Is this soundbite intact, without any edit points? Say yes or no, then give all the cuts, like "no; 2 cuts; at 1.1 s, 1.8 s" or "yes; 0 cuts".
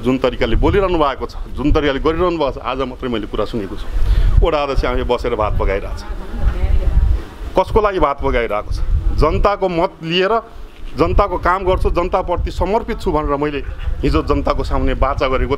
yes; 0 cuts